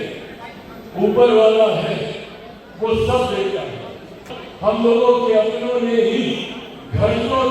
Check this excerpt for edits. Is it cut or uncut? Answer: cut